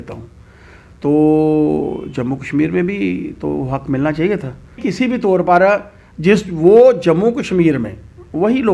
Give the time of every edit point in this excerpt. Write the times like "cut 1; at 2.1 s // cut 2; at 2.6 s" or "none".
cut 1; at 4.8 s